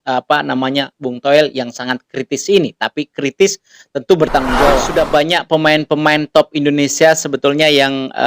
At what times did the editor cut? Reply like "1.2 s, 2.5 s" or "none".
4.7 s